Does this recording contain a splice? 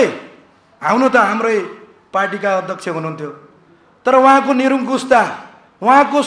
no; 0 cuts

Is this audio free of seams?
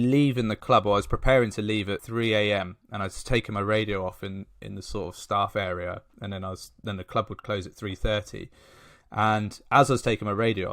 no; 1 cut; at 2.0 s

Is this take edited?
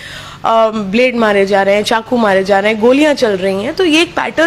no; 0 cuts

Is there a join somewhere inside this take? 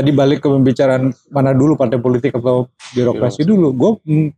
no; 0 cuts

